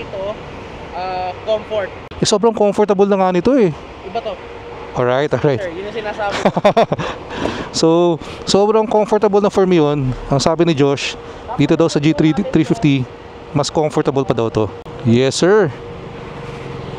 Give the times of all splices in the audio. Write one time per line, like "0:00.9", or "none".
0:02.0
0:14.8